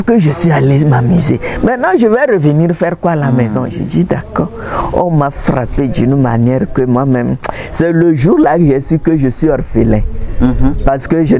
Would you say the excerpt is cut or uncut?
uncut